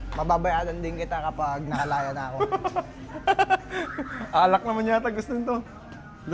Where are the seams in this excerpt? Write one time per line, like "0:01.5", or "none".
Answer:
none